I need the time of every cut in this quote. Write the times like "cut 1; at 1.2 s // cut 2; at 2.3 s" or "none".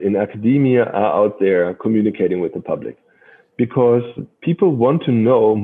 cut 1; at 4.2 s